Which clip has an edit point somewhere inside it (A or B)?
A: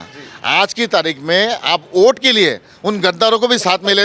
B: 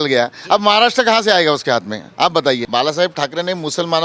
B